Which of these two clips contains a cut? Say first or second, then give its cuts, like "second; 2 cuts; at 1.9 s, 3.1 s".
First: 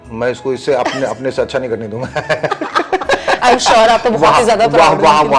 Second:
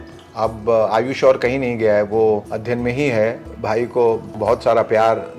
second; 3 cuts; at 2.5 s, 3.4 s, 4.3 s